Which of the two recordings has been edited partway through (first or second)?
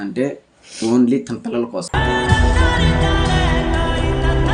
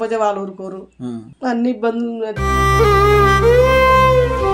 second